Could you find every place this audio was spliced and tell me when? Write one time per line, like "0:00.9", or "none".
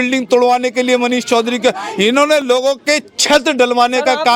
none